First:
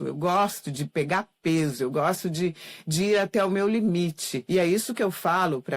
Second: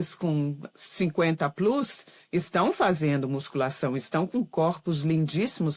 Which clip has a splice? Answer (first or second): first